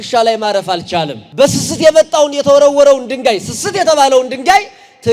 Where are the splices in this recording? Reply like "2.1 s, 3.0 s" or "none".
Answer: 1.2 s